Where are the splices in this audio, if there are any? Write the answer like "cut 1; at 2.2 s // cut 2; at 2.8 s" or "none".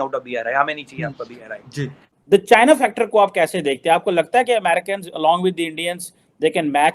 cut 1; at 2.2 s